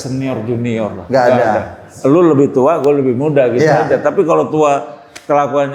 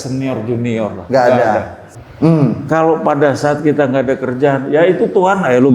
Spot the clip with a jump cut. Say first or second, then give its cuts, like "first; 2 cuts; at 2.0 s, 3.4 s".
second; 1 cut; at 1.8 s